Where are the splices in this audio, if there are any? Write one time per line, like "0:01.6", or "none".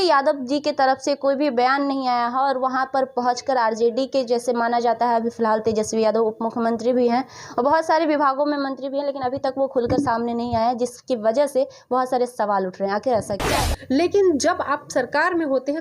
0:13.7